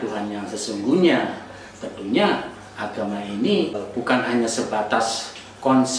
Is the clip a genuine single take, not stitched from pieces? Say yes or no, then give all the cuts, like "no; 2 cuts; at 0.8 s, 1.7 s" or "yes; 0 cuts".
no; 1 cut; at 3.8 s